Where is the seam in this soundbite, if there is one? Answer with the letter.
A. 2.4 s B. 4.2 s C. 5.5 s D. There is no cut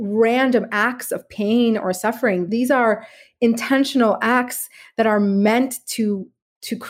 A